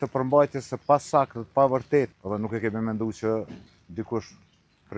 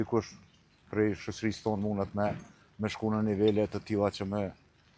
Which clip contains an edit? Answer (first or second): first